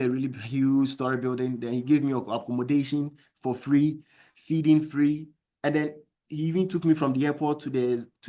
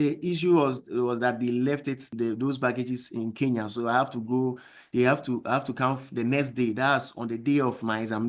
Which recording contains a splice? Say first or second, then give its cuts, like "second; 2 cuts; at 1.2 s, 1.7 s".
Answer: second; 1 cut; at 2.1 s